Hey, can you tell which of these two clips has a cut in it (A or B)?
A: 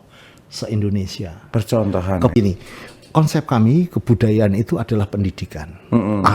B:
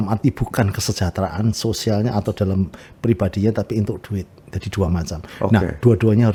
A